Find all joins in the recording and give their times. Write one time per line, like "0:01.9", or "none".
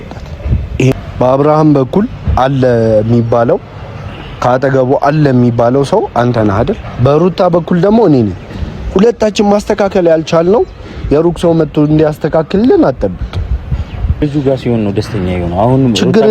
0:00.9
0:14.2